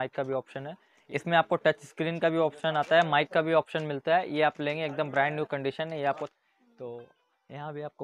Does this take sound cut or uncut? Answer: cut